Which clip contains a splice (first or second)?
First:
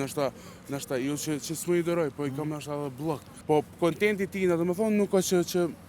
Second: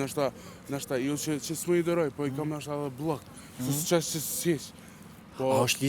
first